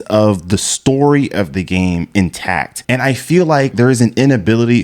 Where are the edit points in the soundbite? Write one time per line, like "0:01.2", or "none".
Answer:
0:02.7
0:03.7